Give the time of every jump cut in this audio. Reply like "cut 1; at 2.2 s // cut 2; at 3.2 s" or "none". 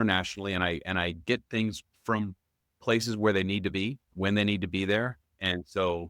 cut 1; at 1.9 s // cut 2; at 4.0 s